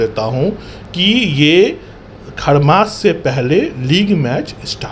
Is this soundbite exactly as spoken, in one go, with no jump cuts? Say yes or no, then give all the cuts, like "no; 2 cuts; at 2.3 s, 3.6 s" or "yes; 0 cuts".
yes; 0 cuts